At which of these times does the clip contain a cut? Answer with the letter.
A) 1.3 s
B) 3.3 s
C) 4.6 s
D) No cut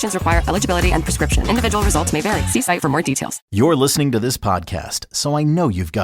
B